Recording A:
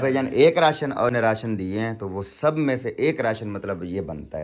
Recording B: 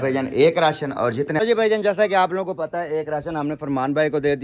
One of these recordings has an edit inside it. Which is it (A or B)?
B